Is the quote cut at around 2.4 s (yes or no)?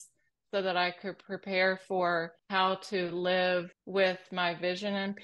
yes